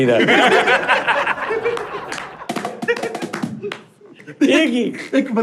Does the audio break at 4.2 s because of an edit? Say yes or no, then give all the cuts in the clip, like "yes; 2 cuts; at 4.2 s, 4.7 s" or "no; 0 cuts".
yes; 1 cut; at 4.2 s